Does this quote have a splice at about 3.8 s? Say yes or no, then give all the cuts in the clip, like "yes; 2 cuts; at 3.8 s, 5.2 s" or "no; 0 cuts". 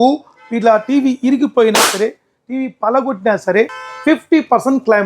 yes; 1 cut; at 3.8 s